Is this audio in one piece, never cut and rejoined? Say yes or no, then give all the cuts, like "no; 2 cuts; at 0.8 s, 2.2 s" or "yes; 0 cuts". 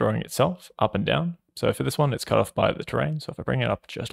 yes; 0 cuts